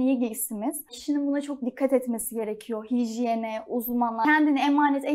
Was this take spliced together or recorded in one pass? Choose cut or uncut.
cut